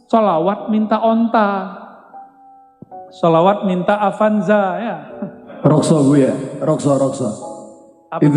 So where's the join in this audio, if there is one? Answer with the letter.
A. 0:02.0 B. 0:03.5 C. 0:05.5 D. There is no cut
C